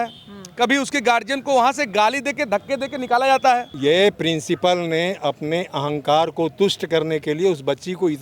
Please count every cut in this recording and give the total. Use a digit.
1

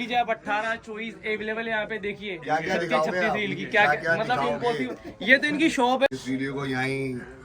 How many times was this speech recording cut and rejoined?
1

